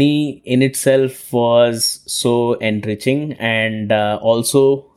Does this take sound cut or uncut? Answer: uncut